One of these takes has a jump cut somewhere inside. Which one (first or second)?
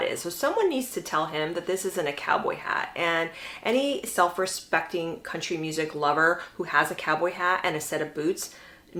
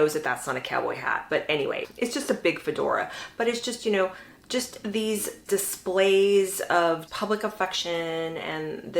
second